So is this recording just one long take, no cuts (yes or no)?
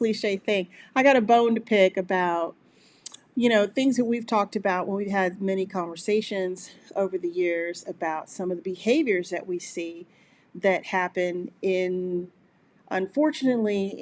yes